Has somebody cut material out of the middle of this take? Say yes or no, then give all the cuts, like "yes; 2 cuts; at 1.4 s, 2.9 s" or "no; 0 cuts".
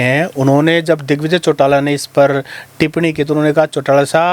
no; 0 cuts